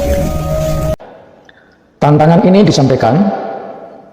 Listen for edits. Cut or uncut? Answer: cut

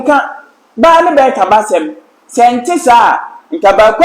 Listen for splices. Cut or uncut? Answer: uncut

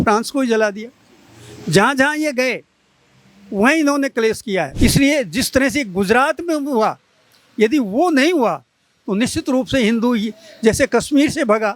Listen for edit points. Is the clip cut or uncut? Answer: cut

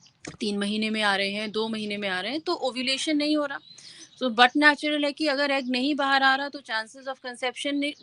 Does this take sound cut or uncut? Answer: uncut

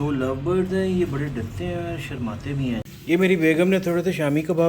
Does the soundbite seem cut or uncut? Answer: cut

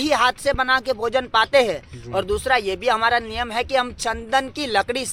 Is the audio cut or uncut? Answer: uncut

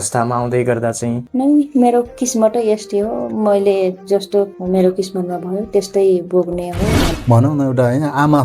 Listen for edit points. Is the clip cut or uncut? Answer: cut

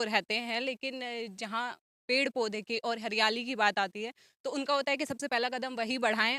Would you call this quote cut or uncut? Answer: uncut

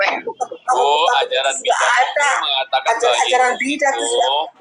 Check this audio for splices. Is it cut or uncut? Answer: uncut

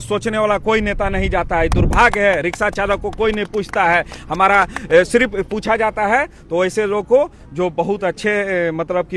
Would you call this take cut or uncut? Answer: uncut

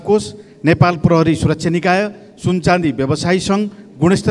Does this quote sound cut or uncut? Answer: uncut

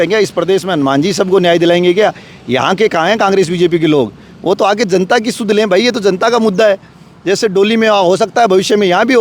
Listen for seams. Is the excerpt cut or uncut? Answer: uncut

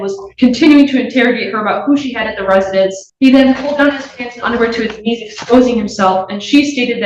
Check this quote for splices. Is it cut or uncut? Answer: cut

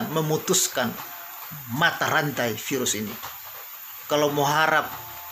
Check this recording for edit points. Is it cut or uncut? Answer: uncut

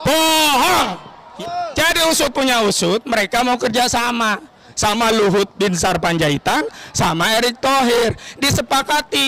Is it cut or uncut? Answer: cut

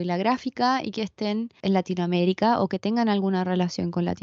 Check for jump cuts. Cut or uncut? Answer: cut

